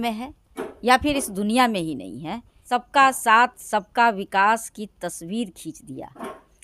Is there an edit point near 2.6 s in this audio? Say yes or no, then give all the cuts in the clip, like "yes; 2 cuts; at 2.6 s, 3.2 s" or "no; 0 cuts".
yes; 1 cut; at 2.6 s